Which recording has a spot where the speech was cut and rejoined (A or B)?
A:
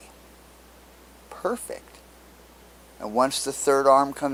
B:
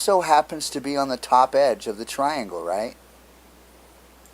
B